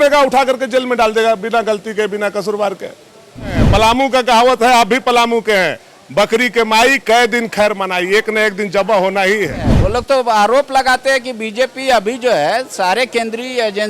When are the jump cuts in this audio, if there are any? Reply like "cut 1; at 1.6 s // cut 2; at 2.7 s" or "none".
cut 1; at 3.6 s // cut 2; at 9.7 s